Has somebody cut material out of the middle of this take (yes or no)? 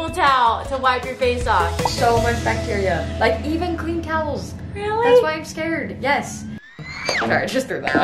yes